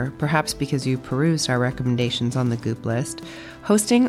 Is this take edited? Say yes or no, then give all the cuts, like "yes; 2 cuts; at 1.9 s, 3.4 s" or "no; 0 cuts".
no; 0 cuts